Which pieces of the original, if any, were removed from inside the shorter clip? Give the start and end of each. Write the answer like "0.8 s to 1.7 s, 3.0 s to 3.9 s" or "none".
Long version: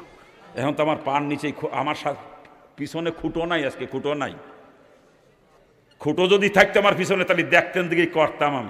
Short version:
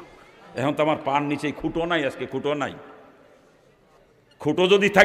1.6 s to 3.2 s